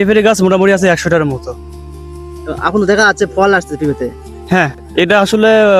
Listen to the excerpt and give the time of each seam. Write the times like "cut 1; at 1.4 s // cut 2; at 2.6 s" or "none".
none